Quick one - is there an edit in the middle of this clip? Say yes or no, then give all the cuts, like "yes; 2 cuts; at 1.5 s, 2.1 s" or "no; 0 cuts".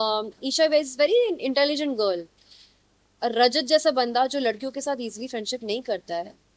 no; 0 cuts